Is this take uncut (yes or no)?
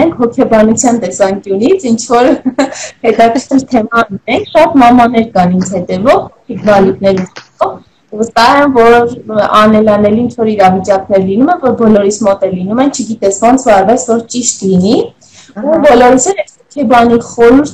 yes